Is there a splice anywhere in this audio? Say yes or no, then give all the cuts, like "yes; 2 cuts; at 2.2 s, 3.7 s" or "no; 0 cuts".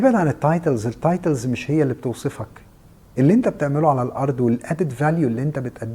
no; 0 cuts